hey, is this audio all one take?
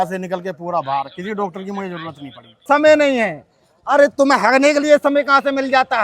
no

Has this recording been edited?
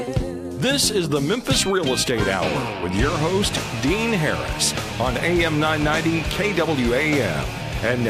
no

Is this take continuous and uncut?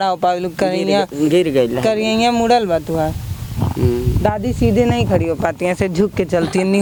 yes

